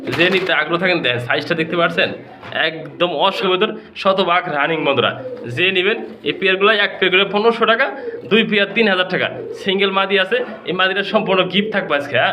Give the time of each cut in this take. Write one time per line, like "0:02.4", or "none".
0:03.4